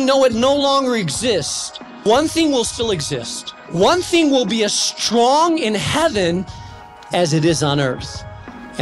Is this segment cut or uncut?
cut